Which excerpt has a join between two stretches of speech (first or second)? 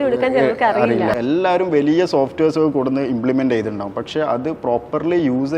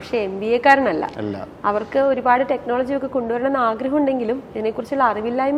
first